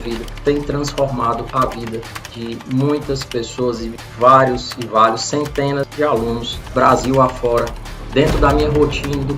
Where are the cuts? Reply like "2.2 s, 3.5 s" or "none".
8.0 s